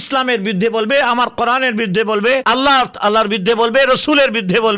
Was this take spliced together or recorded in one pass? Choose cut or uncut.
uncut